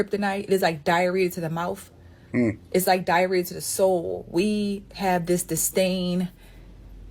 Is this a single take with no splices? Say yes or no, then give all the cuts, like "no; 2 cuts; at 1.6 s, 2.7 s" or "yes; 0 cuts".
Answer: yes; 0 cuts